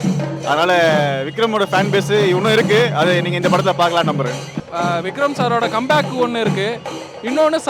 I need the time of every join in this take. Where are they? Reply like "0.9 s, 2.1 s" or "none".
none